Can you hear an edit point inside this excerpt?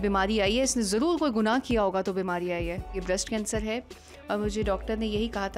yes; 1 cut; at 2.9 s

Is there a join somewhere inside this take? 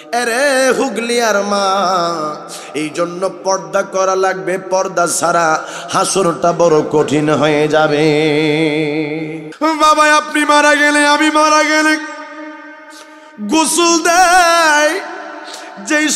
yes; 1 cut; at 9.4 s

